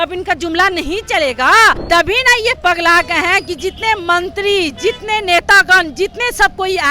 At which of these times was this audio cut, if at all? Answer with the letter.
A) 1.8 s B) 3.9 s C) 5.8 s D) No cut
A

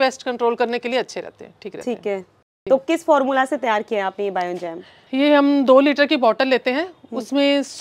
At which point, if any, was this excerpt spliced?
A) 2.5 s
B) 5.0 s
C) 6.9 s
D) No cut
A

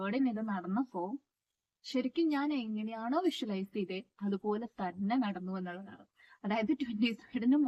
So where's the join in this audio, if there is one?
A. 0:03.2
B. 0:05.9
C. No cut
C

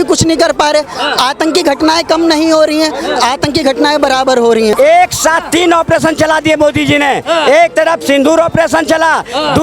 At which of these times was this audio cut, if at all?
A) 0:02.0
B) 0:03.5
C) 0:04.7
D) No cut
C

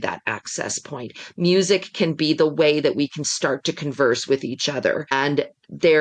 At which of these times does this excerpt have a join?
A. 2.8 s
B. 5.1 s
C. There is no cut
B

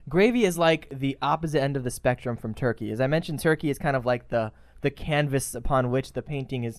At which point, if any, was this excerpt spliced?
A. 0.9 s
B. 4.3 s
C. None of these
A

